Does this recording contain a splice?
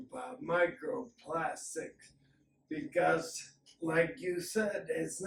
no; 0 cuts

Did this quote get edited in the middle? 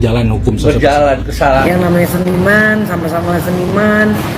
yes; 1 cut; at 1.6 s

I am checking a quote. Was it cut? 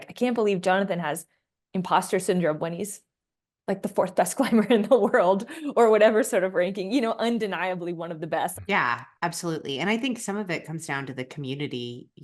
yes; 1 cut; at 8.5 s

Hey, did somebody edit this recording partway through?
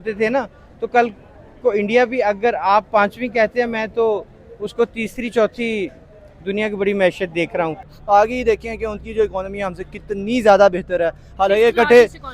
yes; 1 cut; at 7.9 s

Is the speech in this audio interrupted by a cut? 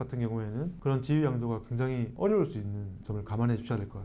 no; 0 cuts

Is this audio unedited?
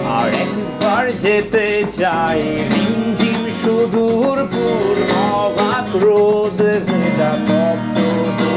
yes; 0 cuts

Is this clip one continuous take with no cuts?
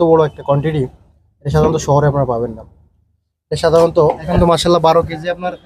no; 1 cut; at 4.3 s

